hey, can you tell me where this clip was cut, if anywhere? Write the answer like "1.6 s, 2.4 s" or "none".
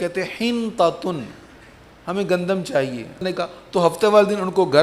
3.2 s